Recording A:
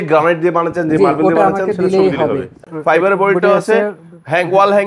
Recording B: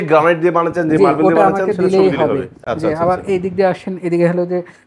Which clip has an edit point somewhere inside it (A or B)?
A